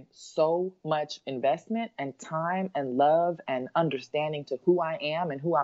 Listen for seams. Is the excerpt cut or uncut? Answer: uncut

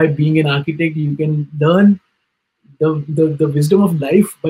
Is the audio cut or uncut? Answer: uncut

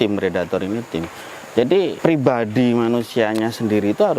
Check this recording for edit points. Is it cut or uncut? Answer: cut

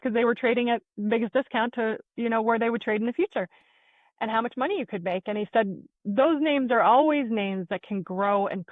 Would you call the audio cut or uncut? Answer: uncut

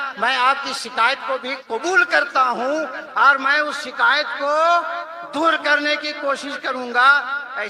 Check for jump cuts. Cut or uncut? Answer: uncut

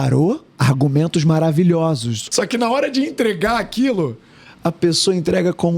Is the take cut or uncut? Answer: cut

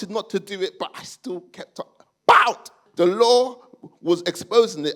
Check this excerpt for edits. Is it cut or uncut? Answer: cut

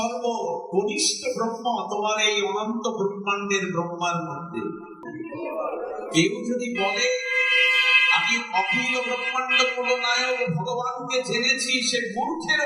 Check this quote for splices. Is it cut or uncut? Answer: cut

